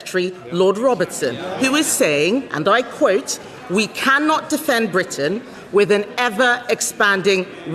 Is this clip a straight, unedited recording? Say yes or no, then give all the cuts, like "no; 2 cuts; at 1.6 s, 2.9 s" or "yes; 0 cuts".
yes; 0 cuts